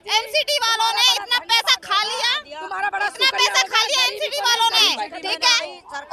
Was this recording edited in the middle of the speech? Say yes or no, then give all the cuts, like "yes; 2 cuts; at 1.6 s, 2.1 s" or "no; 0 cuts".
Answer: no; 0 cuts